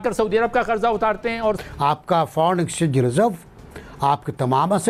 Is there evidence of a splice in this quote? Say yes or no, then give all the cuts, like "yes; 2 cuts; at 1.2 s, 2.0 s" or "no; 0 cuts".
yes; 1 cut; at 1.2 s